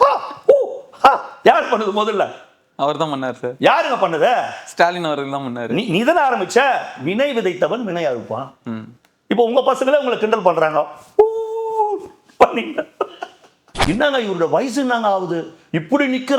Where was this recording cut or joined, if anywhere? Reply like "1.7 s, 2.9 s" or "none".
13.7 s